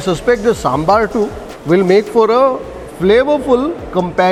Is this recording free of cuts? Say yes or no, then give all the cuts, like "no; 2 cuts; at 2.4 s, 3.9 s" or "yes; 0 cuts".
yes; 0 cuts